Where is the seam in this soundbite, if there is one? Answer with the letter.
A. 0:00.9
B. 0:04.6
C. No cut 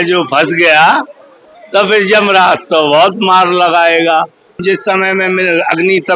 B